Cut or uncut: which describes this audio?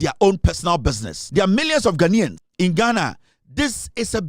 cut